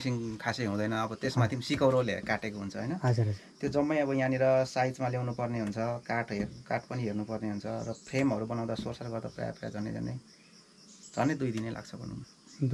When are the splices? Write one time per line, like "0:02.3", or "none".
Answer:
none